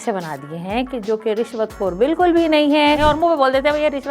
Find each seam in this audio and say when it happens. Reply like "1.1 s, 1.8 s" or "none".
3.0 s